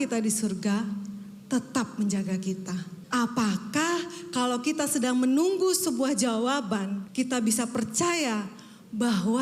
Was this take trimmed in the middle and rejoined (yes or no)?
yes